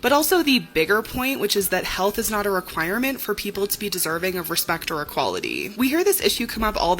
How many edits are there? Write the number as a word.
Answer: one